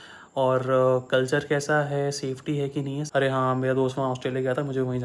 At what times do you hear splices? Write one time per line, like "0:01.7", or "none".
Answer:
0:03.0